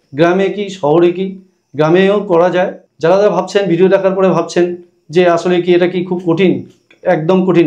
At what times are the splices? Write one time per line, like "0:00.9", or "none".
0:02.8